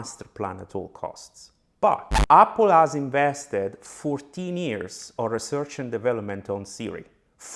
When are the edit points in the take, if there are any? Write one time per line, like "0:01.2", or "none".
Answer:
0:02.1